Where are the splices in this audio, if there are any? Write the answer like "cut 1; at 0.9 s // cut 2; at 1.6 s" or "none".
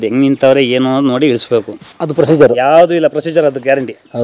none